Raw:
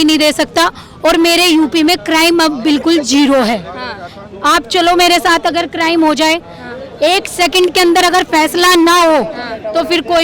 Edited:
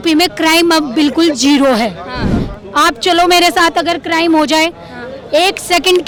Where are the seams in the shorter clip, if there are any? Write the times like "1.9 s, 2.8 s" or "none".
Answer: none